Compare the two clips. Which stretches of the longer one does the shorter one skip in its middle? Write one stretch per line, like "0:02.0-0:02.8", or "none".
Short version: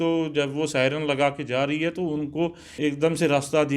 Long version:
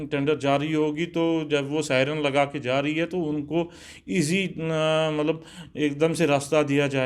0:03.8-0:05.6